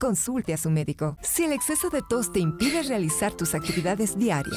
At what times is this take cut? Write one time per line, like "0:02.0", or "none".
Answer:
0:01.2